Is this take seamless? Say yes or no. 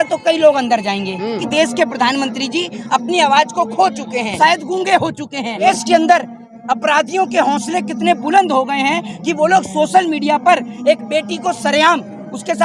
no